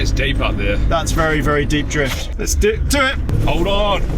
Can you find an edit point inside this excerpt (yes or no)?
yes